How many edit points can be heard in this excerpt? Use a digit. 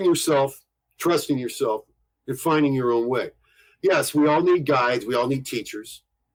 0